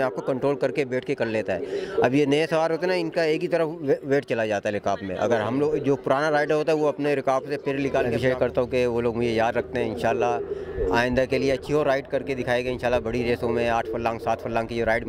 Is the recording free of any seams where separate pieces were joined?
no; 1 cut; at 8.1 s

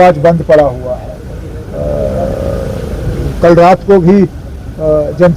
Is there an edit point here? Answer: no; 0 cuts

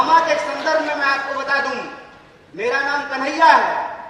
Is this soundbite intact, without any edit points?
yes; 0 cuts

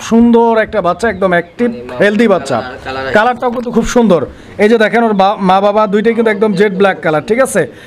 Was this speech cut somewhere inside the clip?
no; 0 cuts

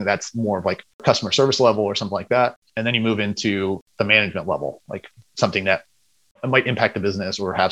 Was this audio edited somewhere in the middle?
yes; 4 cuts; at 1.0 s, 2.7 s, 3.8 s, 6.2 s

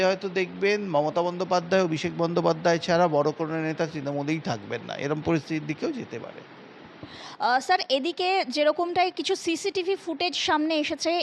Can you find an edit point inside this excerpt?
no; 0 cuts

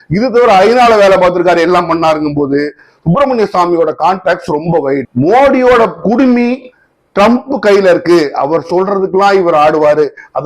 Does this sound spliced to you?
yes; 1 cut; at 5.0 s

